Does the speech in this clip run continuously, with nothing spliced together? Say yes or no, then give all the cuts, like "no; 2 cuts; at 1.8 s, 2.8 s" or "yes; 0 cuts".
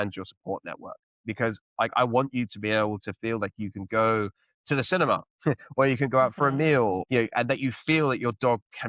no; 1 cut; at 7.0 s